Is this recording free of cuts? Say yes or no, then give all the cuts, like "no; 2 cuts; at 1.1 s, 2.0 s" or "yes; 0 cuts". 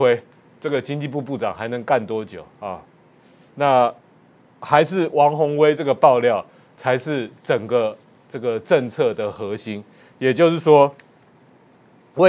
yes; 0 cuts